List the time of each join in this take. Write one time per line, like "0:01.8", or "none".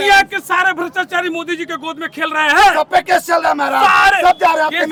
none